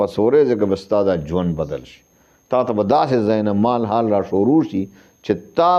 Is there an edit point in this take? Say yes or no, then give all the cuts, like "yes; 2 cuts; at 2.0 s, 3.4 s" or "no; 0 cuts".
no; 0 cuts